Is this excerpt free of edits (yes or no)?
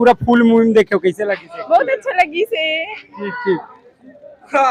yes